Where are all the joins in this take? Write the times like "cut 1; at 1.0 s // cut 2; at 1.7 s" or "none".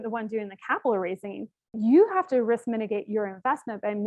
cut 1; at 1.7 s